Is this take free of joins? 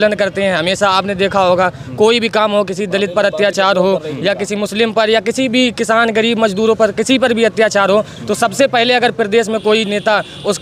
yes; 0 cuts

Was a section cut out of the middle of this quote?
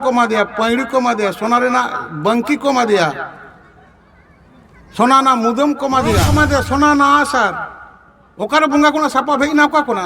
yes; 1 cut; at 6.3 s

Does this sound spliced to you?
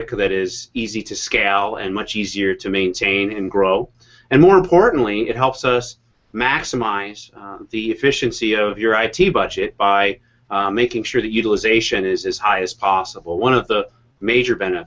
yes; 1 cut; at 6.6 s

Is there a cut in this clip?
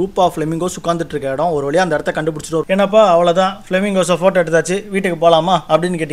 yes; 1 cut; at 2.7 s

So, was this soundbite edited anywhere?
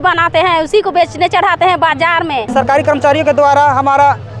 yes; 1 cut; at 2.5 s

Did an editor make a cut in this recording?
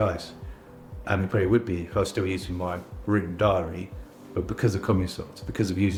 no; 0 cuts

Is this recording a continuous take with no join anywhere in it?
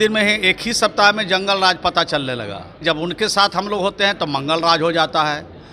no; 1 cut; at 2.8 s

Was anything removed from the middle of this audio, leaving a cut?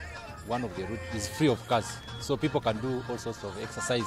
yes; 1 cut; at 1.1 s

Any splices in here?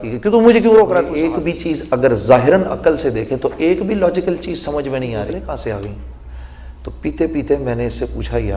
yes; 2 cuts; at 1.1 s, 5.3 s

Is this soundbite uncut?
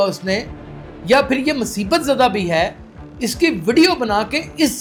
yes; 0 cuts

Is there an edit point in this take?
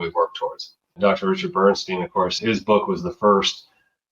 yes; 2 cuts; at 1.0 s, 2.4 s

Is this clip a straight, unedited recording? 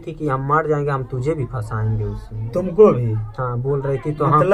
yes; 0 cuts

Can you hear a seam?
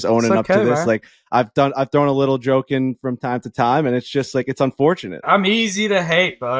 yes; 1 cut; at 5.2 s

